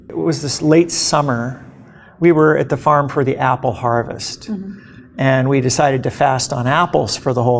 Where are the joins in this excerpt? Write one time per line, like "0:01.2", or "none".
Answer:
none